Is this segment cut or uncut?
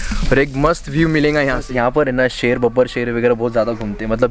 cut